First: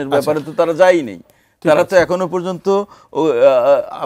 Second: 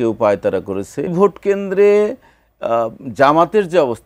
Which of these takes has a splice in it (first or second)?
second